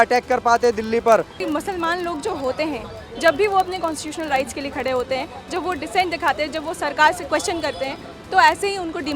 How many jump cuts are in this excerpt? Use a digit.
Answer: 1